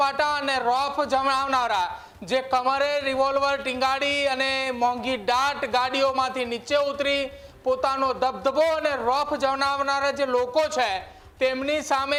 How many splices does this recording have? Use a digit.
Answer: 0